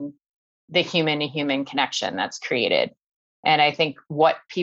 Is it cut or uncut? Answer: uncut